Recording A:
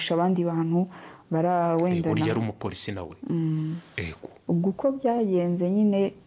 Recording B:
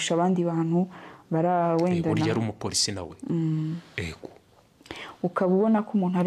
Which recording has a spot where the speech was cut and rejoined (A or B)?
A